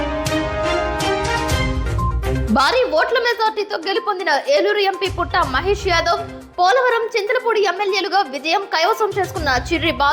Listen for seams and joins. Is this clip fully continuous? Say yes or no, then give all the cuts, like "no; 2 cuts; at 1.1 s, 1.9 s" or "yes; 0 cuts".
no; 1 cut; at 2.4 s